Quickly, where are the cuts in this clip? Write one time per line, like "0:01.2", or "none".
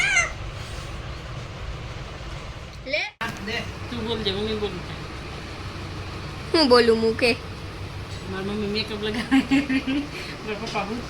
0:03.1